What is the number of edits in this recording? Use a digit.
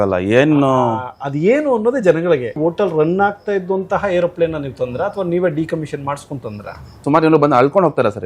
2